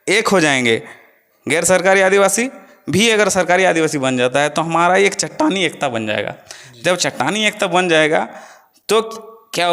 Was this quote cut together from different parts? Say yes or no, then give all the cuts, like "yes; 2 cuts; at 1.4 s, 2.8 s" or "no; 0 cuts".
no; 0 cuts